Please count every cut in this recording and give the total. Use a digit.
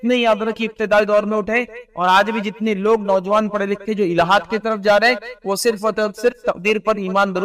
0